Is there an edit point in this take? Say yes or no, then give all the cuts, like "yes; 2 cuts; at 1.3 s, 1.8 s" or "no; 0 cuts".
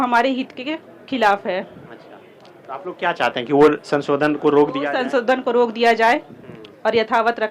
no; 0 cuts